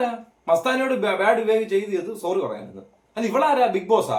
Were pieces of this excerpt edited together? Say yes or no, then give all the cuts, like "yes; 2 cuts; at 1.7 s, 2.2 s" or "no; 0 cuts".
no; 0 cuts